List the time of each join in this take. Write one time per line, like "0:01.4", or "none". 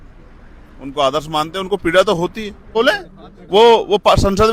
0:02.7